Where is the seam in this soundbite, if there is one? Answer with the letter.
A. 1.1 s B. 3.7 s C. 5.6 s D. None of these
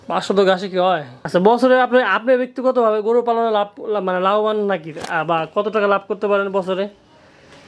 A